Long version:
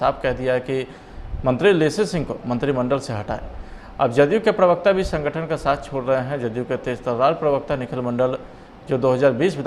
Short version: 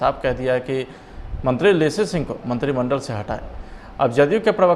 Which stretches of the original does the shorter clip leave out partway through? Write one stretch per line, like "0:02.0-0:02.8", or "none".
none